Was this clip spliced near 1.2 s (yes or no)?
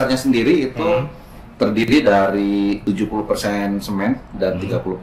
no